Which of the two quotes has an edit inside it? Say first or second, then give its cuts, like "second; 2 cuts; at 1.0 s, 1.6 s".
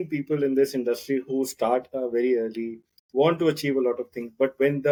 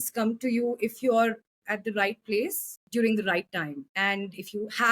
second; 2 cuts; at 2.7 s, 3.9 s